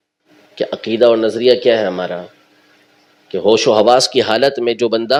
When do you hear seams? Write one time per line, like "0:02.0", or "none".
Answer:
none